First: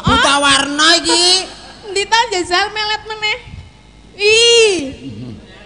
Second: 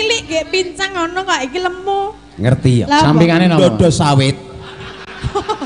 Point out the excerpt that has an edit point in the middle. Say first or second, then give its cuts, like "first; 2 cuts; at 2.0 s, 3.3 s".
second; 1 cut; at 2.8 s